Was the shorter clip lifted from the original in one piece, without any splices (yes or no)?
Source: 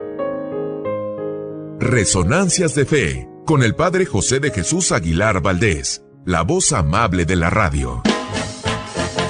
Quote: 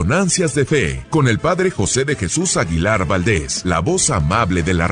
no